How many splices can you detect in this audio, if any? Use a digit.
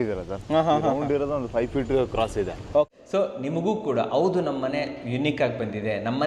1